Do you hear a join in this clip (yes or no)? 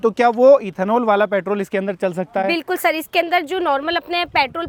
no